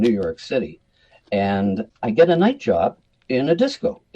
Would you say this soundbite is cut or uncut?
cut